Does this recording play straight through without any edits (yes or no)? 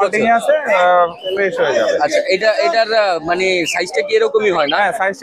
yes